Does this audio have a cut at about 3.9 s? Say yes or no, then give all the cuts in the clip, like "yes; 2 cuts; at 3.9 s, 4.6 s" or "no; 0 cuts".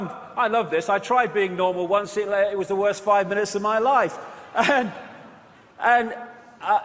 yes; 1 cut; at 3.9 s